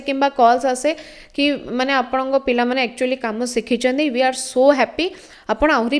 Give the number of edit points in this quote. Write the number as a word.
zero